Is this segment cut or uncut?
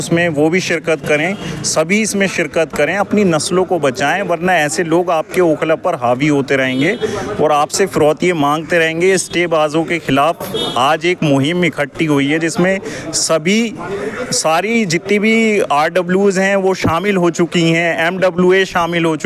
uncut